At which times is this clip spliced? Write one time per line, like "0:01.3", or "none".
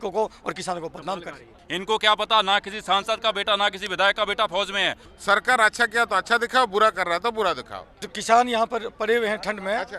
0:01.6
0:05.0
0:08.1